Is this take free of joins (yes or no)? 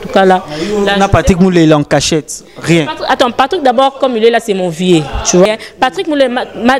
no